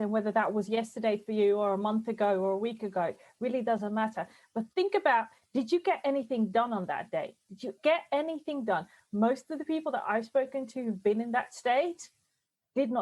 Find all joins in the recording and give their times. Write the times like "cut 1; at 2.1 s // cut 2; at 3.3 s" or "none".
none